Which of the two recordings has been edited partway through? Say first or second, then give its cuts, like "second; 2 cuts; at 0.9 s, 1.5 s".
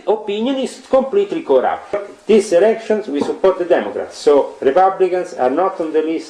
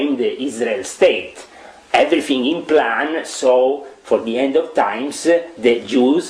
first; 1 cut; at 2.0 s